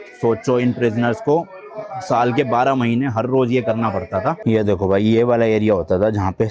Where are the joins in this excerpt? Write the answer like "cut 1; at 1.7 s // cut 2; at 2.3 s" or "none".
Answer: cut 1; at 4.4 s